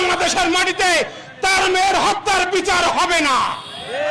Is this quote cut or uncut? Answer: uncut